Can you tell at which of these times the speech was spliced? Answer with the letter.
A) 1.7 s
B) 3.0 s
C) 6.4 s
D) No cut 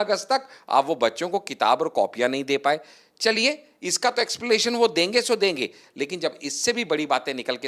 D